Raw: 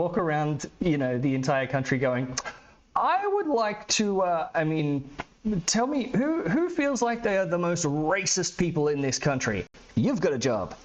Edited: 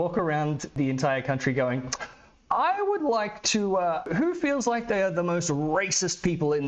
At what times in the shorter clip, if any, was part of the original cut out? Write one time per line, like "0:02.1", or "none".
0:00.7
0:04.1